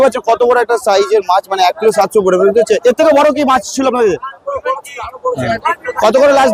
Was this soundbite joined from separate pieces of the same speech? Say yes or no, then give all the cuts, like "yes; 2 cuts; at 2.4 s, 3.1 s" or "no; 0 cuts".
no; 0 cuts